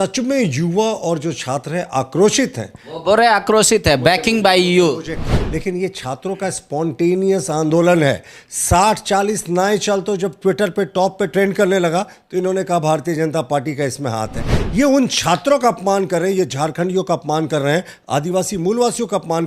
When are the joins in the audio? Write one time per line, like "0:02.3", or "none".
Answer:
0:05.3